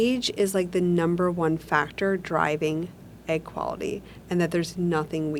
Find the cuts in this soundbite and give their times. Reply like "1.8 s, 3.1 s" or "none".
none

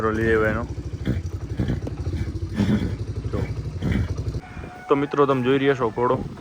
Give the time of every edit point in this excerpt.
4.4 s

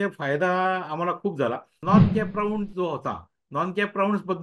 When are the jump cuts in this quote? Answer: 1.8 s

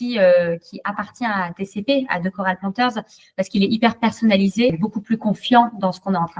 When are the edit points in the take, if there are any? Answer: 4.8 s

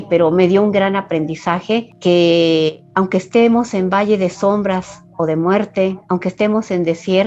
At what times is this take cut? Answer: none

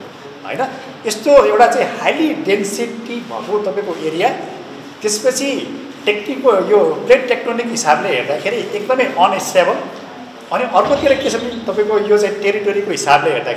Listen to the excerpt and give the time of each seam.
none

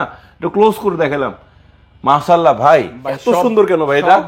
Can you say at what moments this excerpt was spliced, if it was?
none

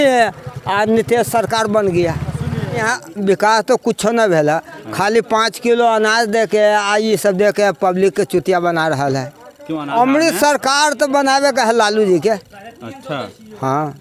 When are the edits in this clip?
2.8 s, 9.9 s

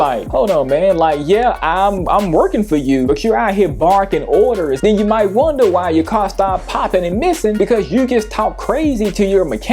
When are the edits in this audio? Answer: 4.8 s

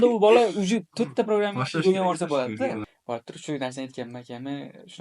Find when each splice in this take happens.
2.9 s

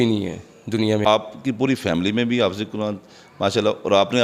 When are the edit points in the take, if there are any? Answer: 1.1 s

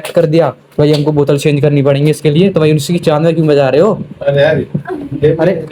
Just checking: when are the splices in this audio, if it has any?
none

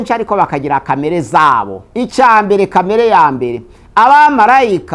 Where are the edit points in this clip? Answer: 1.8 s

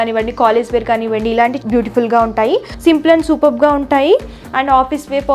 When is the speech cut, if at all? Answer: 2.7 s

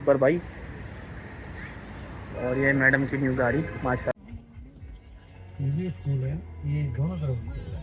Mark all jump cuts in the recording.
4.1 s

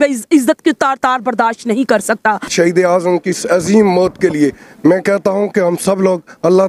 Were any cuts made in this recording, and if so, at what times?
2.5 s

